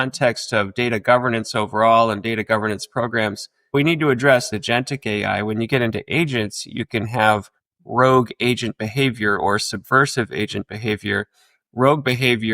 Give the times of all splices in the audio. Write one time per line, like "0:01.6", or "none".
0:03.7
0:04.5